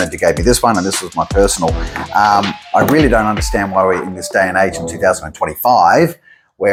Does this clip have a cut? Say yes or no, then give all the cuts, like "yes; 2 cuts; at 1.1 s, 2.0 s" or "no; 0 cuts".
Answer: no; 0 cuts